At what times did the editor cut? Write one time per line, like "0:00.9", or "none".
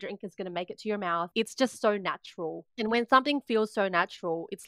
0:01.3
0:02.7